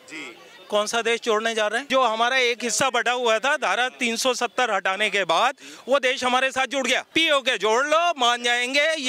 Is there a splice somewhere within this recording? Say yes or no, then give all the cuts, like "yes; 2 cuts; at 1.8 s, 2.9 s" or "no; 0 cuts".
yes; 2 cuts; at 1.9 s, 7.0 s